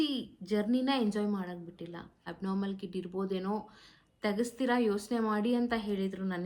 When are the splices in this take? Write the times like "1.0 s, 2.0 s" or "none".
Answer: 2.2 s